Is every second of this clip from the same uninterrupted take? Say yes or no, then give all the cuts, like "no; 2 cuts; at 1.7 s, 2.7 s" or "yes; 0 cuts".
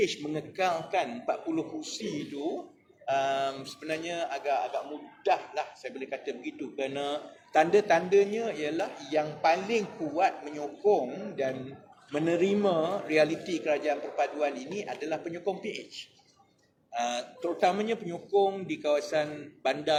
yes; 0 cuts